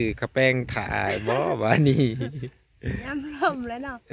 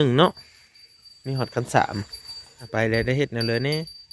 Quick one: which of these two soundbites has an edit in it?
second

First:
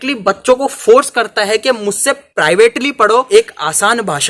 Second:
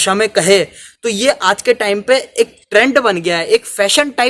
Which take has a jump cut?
first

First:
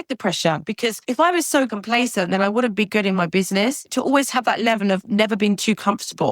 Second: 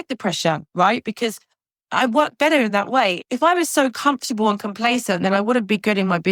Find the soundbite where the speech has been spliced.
first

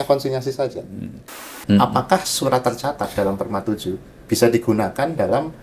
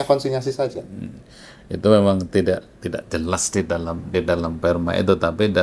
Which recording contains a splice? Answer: first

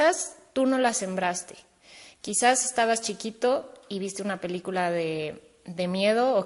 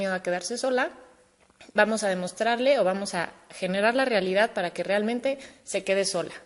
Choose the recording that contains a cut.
second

